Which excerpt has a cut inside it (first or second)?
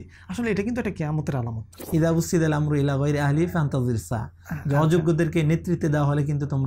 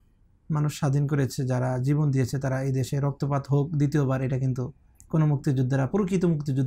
first